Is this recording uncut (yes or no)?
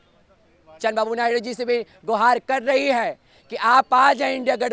yes